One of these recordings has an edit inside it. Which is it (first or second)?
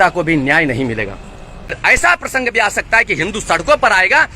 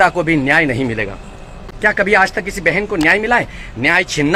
first